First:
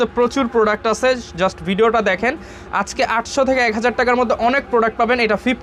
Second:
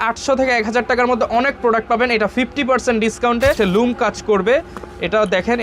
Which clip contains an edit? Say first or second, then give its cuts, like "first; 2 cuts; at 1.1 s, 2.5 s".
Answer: second; 1 cut; at 3.6 s